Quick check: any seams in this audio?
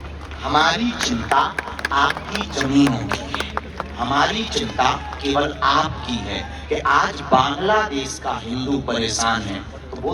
no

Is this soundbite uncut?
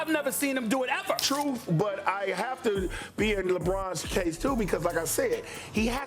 no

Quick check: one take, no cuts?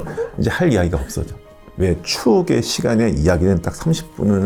yes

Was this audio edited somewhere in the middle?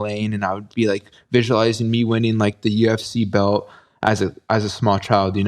no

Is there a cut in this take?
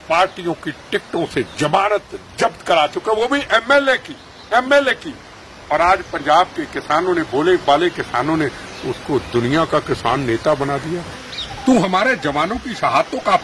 yes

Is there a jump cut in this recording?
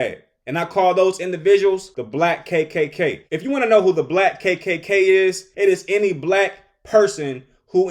yes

